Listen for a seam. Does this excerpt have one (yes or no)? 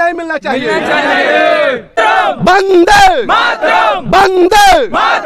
yes